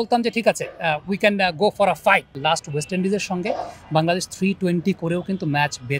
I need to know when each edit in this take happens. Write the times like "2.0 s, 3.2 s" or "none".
2.4 s